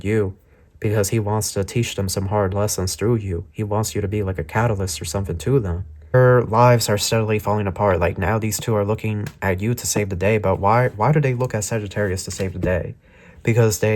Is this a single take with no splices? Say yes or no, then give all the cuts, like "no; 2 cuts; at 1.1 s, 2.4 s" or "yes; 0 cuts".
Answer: no; 1 cut; at 6.1 s